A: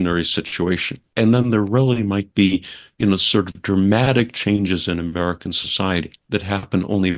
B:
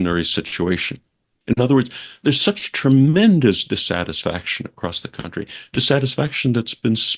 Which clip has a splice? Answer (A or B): A